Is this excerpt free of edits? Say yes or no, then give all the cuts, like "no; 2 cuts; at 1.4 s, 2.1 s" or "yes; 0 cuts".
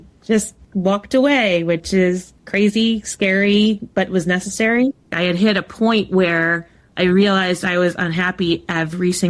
no; 1 cut; at 5.1 s